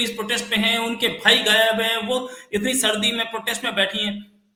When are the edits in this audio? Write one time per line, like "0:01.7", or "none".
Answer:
none

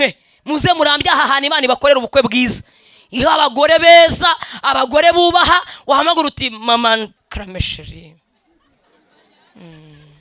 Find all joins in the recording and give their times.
0:07.2

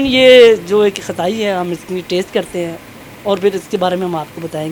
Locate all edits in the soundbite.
none

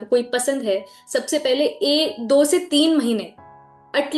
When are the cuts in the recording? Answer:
none

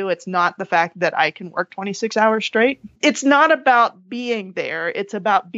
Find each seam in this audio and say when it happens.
0:03.0

